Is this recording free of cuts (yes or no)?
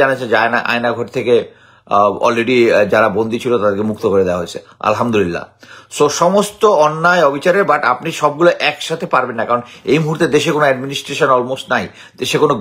yes